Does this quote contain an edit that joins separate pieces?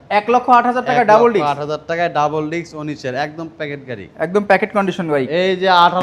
no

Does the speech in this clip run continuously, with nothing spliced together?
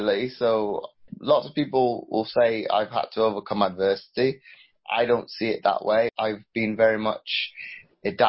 no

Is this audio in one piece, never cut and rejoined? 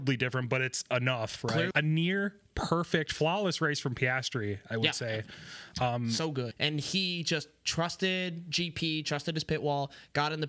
no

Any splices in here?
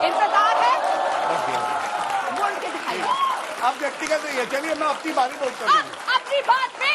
yes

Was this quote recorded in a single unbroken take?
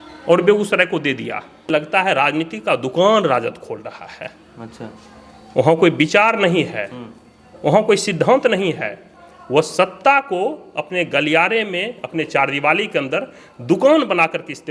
no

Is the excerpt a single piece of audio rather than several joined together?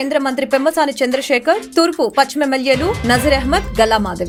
yes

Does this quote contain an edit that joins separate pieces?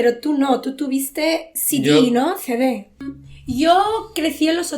yes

